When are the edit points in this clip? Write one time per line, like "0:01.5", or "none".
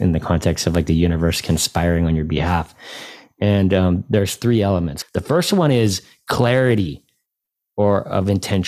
none